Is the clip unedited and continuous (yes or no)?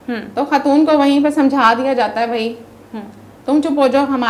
yes